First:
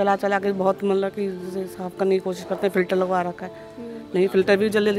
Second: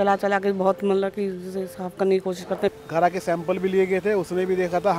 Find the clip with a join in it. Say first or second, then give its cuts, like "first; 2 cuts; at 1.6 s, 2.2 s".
second; 1 cut; at 2.7 s